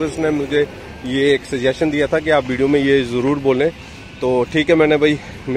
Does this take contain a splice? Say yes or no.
no